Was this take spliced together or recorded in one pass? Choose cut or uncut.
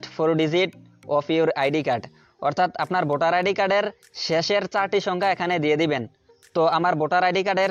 uncut